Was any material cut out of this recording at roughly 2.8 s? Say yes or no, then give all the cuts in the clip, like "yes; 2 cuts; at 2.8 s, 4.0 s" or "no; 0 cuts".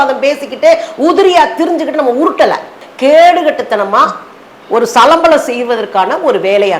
yes; 1 cut; at 2.8 s